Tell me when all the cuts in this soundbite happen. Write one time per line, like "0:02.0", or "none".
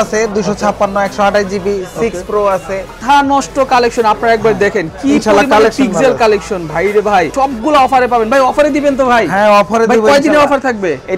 0:03.0
0:07.3